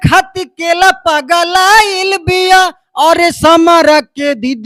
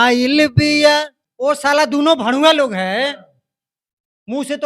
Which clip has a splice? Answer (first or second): second